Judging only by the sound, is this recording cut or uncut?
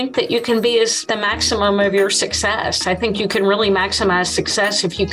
cut